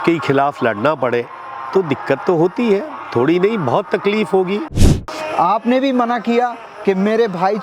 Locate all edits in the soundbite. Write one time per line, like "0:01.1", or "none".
0:04.9